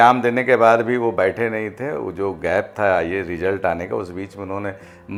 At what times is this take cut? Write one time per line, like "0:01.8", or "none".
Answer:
none